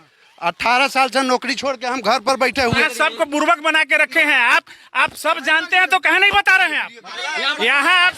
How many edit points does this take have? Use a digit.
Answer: 2